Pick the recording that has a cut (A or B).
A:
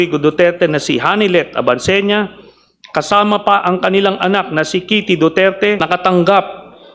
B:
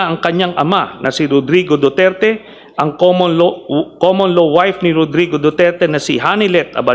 A